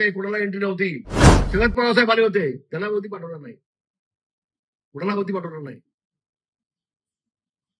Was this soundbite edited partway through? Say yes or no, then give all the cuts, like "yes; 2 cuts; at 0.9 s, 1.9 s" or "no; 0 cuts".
yes; 1 cut; at 1.4 s